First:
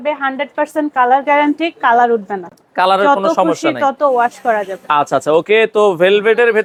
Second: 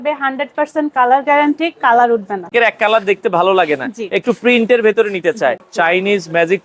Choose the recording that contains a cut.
second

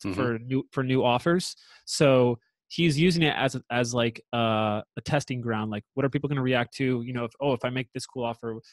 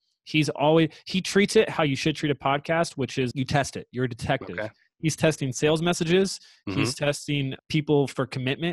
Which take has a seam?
second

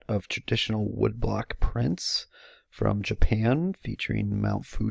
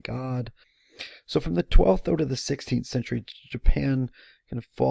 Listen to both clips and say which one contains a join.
first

